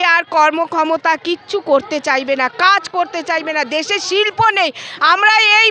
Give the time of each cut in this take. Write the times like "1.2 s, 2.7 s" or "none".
none

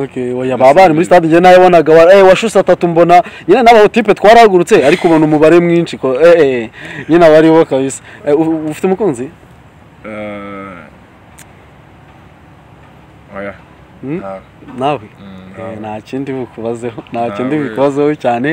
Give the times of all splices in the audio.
none

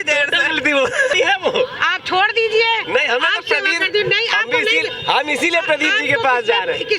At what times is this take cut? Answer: 1.1 s

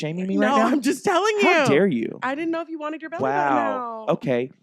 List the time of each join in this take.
none

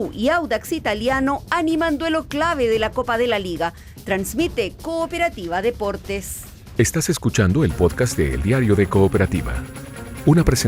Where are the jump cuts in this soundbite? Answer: 6.5 s

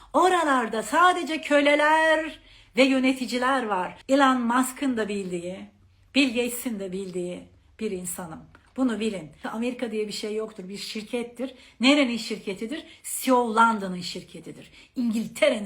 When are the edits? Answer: 3.9 s, 9.4 s

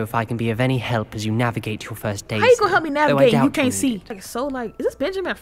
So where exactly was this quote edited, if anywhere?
4.2 s

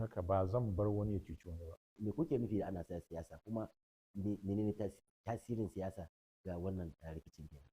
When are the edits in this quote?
2.0 s

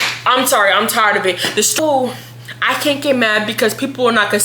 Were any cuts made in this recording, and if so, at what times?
1.8 s

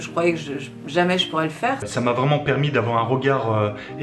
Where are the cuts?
1.8 s

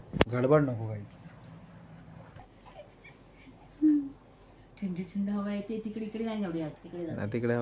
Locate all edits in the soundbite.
2.5 s

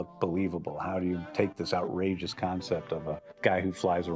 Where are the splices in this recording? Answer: 1.6 s

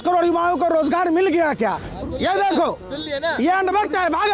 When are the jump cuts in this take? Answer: 1.9 s

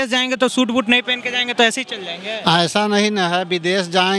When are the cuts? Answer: none

